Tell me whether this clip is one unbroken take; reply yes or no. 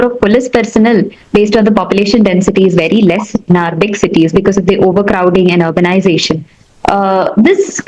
yes